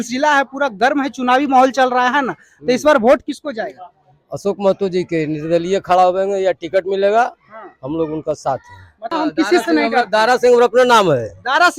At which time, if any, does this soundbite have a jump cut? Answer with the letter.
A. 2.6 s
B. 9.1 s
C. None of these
B